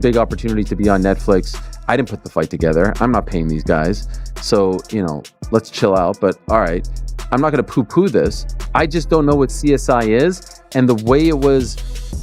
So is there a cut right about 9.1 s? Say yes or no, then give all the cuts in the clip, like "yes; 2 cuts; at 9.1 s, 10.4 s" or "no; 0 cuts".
no; 0 cuts